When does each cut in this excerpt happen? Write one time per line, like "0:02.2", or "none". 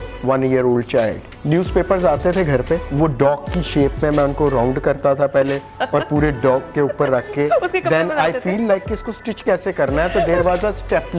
0:01.3
0:02.9

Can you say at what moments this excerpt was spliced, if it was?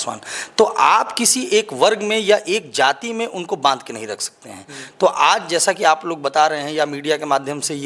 none

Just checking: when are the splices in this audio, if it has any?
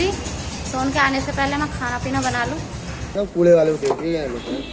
0:03.2

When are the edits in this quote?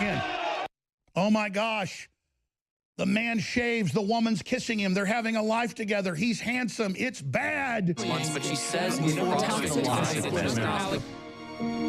0:08.0

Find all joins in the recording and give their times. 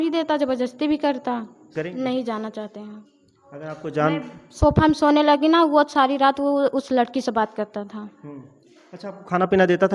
0:01.8

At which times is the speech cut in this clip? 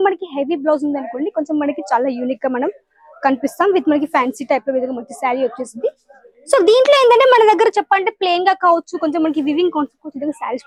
none

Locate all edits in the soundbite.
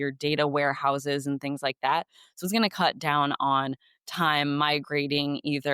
none

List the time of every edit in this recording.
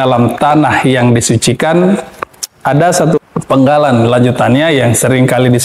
0:03.2

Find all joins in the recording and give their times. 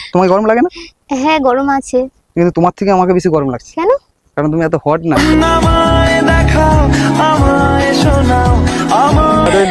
none

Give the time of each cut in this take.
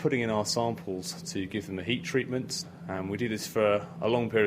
0:02.6

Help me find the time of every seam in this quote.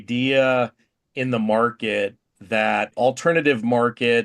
0:02.9

